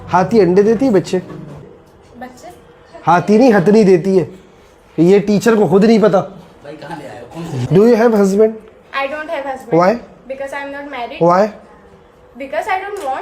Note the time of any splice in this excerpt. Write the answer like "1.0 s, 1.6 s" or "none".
7.5 s